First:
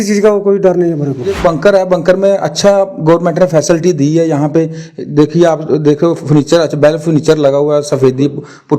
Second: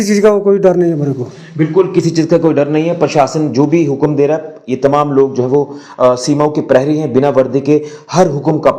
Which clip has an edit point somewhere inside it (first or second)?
first